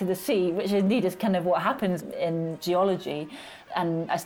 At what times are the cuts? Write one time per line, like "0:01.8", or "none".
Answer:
0:02.0